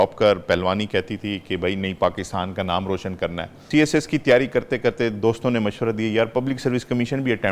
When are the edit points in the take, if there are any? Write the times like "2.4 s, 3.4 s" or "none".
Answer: 3.7 s